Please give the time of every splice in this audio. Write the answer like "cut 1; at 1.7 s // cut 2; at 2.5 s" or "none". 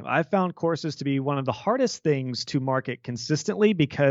none